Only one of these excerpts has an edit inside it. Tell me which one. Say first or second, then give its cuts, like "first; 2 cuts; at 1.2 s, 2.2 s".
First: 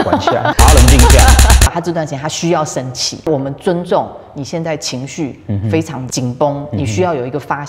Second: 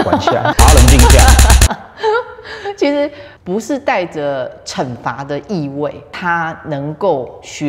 first; 2 cuts; at 1.7 s, 3.3 s